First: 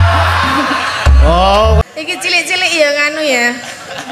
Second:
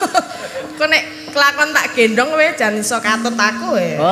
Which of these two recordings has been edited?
first; 1 cut; at 1.8 s

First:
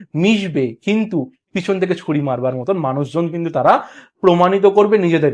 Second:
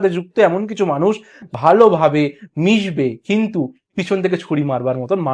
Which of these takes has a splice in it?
second; 1 cut; at 1.3 s

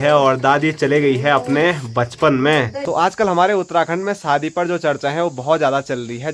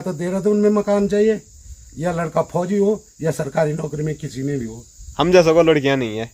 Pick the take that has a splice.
first; 1 cut; at 2.8 s

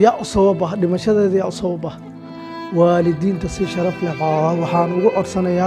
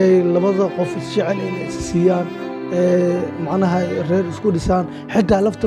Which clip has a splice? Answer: first; 1 cut; at 2.5 s

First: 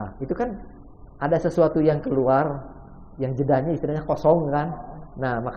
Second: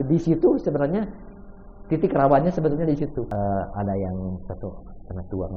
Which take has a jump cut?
second; 1 cut; at 3.4 s

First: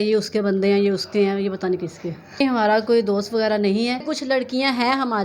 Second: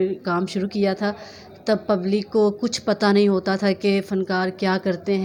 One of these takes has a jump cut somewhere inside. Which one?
first; 2 cuts; at 2.4 s, 4.0 s

